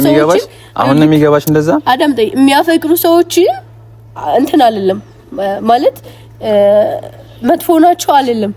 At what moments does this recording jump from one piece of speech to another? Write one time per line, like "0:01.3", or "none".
none